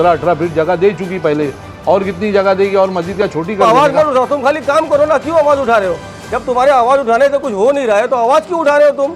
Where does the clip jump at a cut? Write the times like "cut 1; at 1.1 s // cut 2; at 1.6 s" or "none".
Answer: cut 1; at 3.5 s